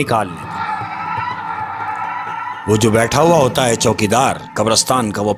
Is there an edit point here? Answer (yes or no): no